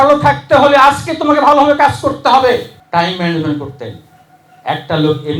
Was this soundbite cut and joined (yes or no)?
yes